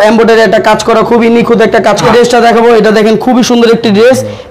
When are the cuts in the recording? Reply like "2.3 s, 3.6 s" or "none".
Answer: 2.0 s

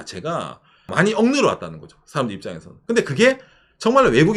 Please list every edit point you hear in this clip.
0.9 s

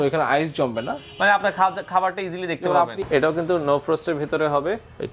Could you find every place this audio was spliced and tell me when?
3.0 s

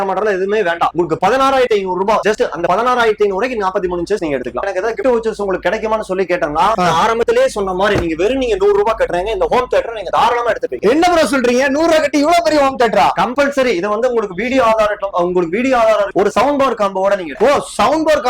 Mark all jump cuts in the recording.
4.6 s, 16.1 s

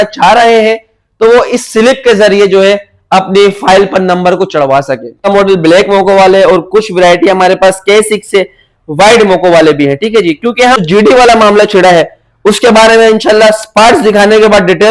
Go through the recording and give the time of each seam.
5.2 s, 10.8 s

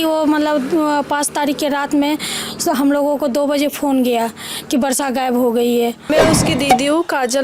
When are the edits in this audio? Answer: 6.1 s

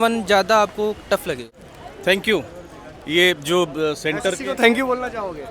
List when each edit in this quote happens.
1.6 s

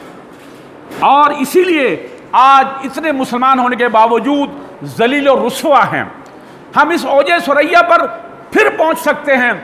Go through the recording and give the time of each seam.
none

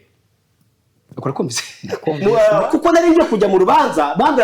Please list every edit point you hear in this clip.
2.2 s

